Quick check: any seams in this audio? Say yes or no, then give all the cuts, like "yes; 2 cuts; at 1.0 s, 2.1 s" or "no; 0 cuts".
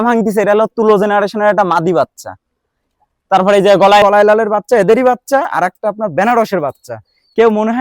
yes; 1 cut; at 4.0 s